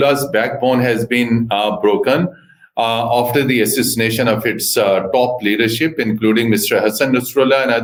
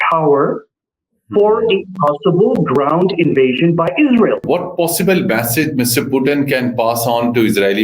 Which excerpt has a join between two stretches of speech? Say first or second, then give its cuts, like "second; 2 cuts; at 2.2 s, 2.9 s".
second; 1 cut; at 4.4 s